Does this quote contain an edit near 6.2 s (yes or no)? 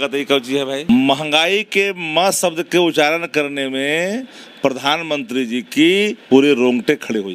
yes